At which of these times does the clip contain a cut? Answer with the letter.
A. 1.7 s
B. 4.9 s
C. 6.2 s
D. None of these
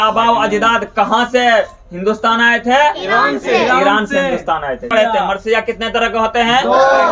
B